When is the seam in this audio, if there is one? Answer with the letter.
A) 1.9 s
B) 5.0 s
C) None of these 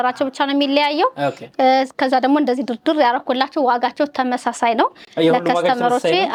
C